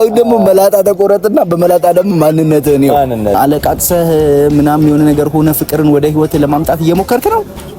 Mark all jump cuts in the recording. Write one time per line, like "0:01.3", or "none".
0:03.4